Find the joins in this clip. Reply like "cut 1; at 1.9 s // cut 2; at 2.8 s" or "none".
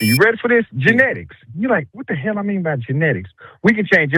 none